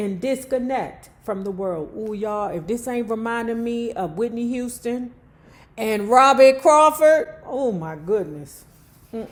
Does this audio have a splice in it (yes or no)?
no